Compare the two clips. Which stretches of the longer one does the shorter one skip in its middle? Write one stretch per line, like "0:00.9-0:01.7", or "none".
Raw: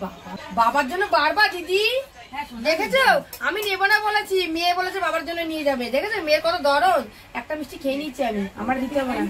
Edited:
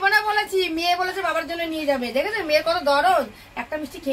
none